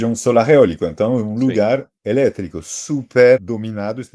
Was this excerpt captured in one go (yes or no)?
no